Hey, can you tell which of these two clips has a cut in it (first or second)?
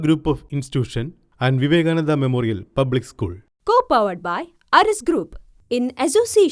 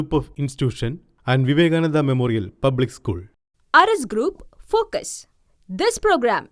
second